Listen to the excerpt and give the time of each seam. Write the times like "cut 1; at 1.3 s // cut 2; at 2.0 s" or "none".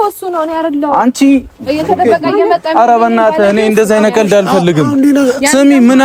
none